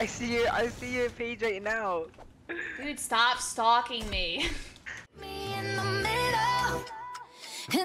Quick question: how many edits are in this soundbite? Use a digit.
1